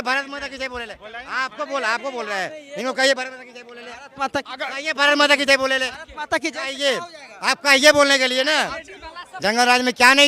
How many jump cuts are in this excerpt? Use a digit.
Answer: 1